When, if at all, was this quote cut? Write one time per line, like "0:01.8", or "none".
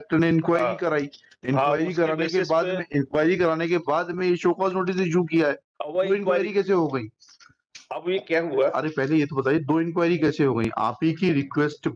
none